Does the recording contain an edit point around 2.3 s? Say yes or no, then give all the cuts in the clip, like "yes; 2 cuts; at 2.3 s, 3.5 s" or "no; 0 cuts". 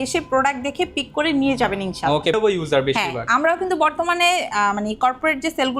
yes; 1 cut; at 2.3 s